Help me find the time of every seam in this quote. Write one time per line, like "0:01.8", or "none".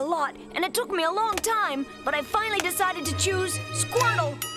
none